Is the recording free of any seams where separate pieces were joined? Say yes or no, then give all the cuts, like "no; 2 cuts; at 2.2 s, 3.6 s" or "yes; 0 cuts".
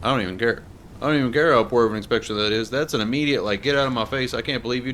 yes; 0 cuts